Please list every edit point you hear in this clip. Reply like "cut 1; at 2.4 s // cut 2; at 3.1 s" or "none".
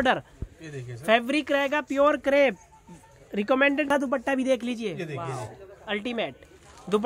cut 1; at 3.9 s